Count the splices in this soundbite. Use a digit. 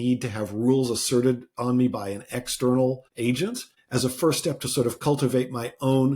1